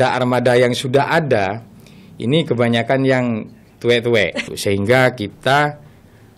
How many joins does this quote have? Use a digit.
1